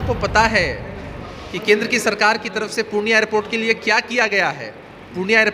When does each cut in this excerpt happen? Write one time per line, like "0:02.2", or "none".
none